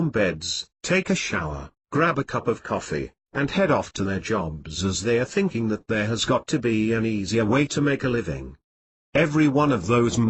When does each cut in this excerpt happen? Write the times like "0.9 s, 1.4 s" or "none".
1.6 s